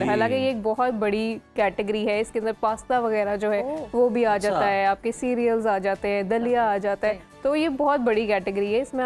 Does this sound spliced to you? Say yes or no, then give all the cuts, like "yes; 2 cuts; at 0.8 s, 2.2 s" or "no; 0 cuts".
no; 0 cuts